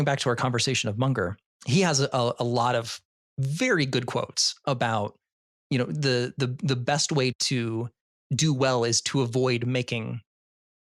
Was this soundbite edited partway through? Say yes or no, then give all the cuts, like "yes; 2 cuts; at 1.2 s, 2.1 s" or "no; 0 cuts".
yes; 2 cuts; at 1.5 s, 7.3 s